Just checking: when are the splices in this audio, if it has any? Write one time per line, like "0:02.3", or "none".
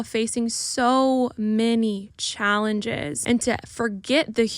0:03.2